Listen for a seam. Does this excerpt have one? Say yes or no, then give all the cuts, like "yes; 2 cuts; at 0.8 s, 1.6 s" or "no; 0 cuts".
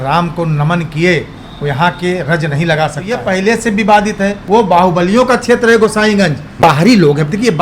yes; 3 cuts; at 3.2 s, 4.4 s, 6.6 s